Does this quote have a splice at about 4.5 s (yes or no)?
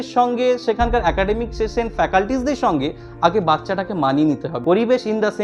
yes